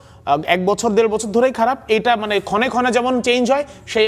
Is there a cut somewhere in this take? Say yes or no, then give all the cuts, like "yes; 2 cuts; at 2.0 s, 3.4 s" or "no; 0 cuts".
no; 0 cuts